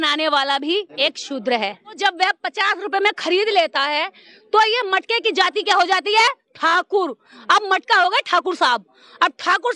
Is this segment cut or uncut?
cut